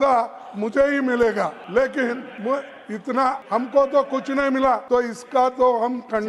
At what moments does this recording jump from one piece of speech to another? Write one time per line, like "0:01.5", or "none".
0:01.6
0:02.3
0:03.4
0:04.8